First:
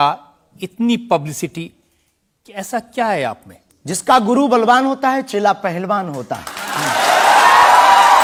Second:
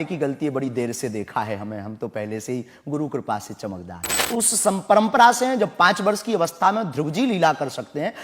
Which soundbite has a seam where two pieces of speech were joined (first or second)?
second